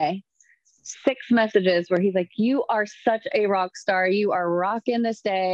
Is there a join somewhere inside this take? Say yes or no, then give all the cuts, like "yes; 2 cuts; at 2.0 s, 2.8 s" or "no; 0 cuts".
no; 0 cuts